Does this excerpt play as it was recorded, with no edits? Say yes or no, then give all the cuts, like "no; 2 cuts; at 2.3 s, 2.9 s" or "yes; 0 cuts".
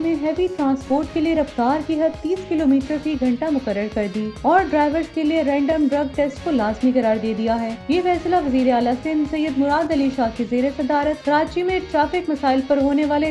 yes; 0 cuts